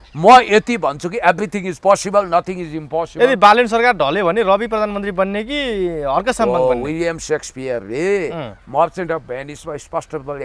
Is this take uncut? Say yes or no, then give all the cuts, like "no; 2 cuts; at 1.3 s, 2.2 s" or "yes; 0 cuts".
yes; 0 cuts